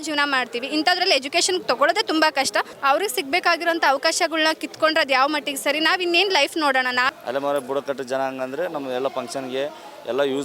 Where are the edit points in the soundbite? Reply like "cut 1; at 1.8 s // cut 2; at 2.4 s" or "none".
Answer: cut 1; at 2.7 s // cut 2; at 7.1 s